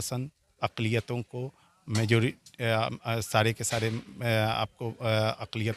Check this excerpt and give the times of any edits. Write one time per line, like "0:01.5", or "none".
none

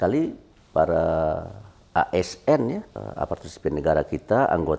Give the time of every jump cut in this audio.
0:03.0

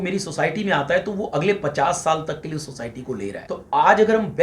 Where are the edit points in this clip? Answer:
0:03.4

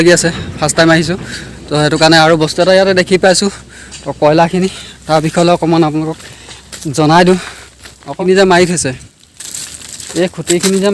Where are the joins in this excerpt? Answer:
0:08.2

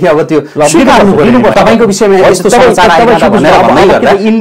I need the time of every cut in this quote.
0:01.5

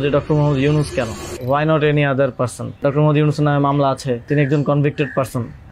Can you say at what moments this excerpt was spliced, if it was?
0:01.3
0:02.8
0:04.3

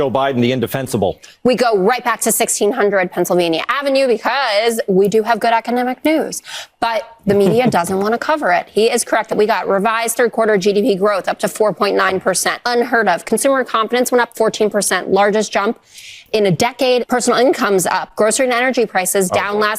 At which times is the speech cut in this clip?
0:09.3
0:12.5
0:17.0

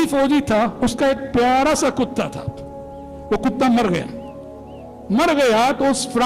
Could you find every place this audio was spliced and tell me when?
none

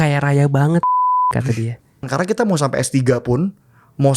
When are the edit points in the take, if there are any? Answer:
0:02.1

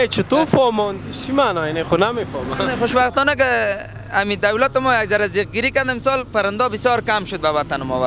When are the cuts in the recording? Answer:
0:02.7

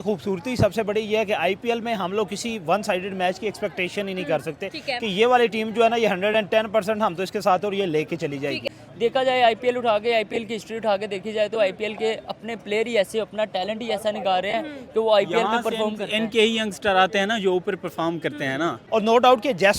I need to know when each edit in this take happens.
0:08.8
0:18.8

